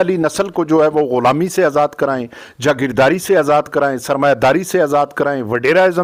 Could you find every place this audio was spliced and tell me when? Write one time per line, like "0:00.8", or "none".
none